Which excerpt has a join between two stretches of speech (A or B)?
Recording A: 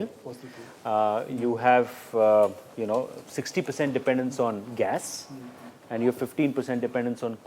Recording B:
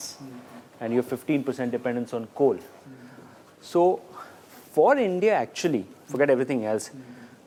A